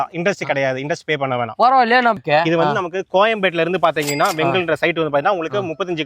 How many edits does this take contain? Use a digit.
1